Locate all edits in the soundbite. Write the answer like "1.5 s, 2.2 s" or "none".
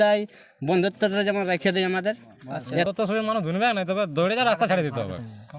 2.9 s